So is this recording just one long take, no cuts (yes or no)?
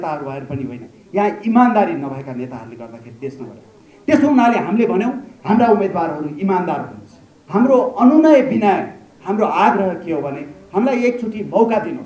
no